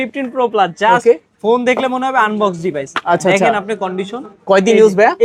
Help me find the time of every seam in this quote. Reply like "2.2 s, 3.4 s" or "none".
none